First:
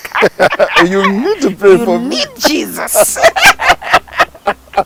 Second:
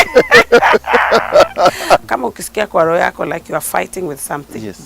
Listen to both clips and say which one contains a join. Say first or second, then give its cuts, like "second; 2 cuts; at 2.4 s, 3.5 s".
second; 1 cut; at 2.0 s